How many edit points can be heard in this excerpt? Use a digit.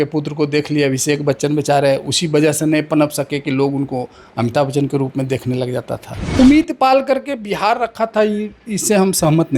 1